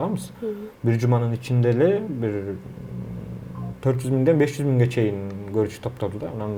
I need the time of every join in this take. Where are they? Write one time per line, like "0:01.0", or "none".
none